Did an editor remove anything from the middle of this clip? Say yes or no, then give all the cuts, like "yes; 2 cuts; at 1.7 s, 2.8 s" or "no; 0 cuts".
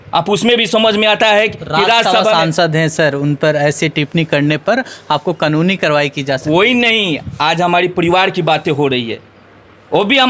no; 0 cuts